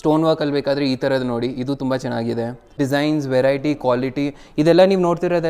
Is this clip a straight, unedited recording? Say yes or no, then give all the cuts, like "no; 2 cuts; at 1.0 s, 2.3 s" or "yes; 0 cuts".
yes; 0 cuts